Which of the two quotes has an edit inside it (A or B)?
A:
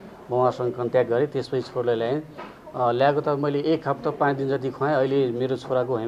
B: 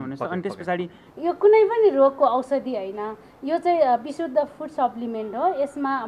B